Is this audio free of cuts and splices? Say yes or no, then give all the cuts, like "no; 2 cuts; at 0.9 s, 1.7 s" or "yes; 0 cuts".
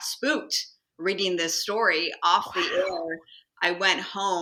yes; 0 cuts